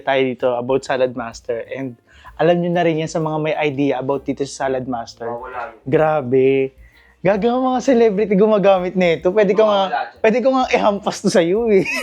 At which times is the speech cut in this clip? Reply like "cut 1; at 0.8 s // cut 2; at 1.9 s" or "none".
none